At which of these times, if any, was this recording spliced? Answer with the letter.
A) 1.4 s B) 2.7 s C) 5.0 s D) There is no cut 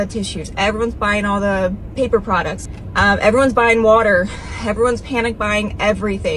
B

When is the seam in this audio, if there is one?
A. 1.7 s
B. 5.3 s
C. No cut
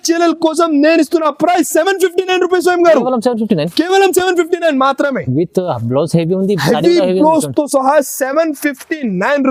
C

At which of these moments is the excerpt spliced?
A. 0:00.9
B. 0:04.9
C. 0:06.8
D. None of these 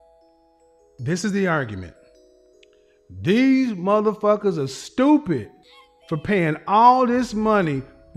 A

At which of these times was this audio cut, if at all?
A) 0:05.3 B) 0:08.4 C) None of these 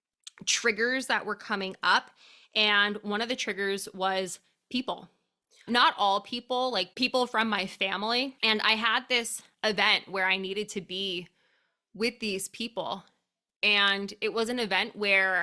B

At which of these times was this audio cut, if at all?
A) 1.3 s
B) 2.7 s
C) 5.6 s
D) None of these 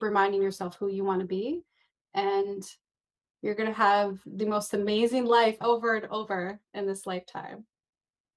D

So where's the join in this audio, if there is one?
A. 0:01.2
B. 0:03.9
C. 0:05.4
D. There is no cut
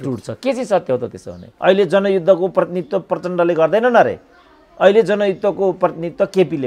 A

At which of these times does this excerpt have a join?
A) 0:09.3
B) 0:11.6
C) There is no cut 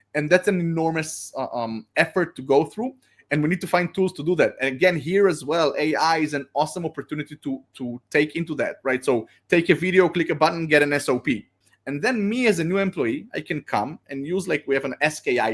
B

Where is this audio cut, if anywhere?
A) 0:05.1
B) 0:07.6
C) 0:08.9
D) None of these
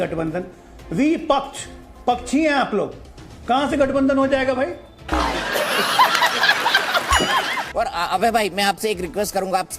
B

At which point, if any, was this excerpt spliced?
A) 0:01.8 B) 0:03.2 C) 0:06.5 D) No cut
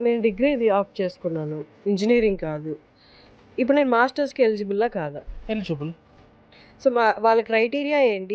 D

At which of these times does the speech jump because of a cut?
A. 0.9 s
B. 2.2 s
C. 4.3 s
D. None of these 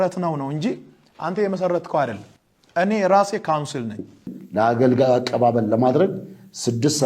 C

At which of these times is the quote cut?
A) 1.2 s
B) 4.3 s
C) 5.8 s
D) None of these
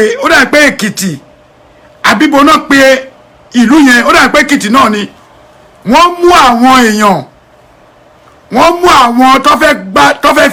D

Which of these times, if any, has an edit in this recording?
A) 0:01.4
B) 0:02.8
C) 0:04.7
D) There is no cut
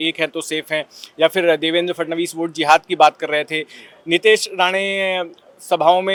D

